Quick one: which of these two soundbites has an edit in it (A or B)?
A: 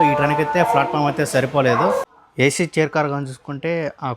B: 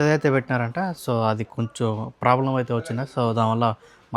A